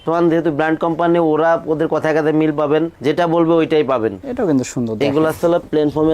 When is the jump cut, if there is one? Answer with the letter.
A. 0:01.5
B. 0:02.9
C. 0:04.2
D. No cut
C